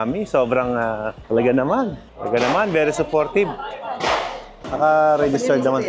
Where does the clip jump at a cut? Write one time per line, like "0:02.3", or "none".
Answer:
0:04.5